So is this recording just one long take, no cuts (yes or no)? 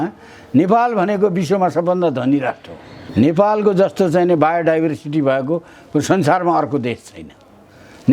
no